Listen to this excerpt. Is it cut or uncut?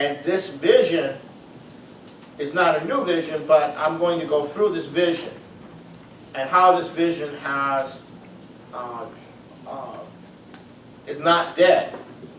uncut